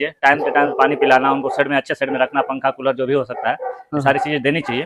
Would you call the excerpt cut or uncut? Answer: uncut